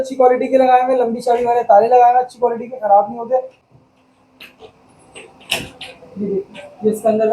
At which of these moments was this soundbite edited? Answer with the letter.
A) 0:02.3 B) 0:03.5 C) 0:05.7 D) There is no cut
B